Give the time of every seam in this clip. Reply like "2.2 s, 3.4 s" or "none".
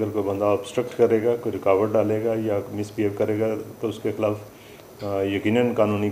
none